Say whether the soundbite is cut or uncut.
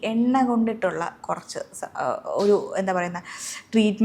uncut